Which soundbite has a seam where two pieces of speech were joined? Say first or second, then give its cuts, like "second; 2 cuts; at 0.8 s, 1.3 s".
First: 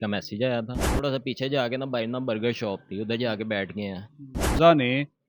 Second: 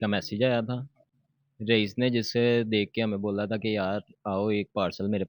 first; 2 cuts; at 1.0 s, 4.5 s